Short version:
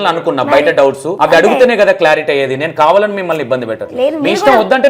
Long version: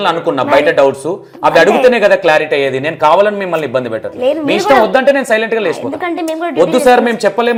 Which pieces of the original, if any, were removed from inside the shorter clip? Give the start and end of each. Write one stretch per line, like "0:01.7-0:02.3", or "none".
0:01.1-0:01.3